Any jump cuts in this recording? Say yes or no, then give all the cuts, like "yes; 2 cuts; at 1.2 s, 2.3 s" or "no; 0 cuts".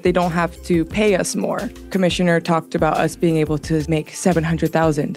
yes; 1 cut; at 1.8 s